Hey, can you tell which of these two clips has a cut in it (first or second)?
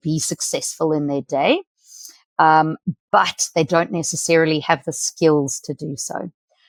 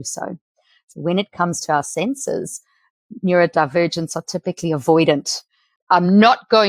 second